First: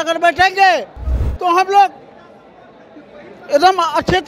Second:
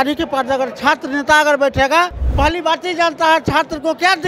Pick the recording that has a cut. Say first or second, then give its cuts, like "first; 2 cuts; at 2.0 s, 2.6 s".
second; 1 cut; at 2.2 s